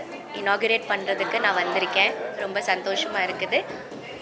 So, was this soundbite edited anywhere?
no; 0 cuts

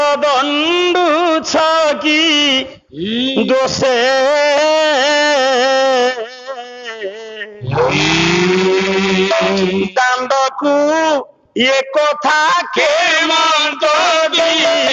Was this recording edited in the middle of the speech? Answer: no; 0 cuts

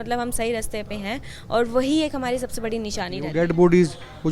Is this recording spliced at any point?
yes; 1 cut; at 3.2 s

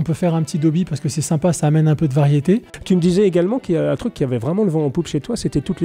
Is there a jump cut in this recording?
yes; 1 cut; at 2.9 s

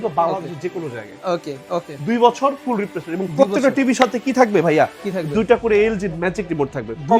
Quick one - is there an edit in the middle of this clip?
no; 0 cuts

